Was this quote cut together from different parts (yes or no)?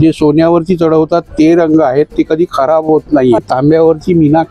yes